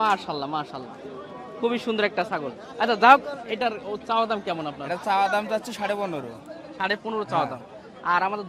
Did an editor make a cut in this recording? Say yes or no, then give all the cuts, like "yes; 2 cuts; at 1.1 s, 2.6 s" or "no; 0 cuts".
no; 0 cuts